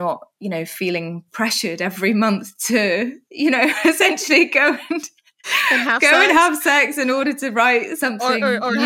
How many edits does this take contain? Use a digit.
0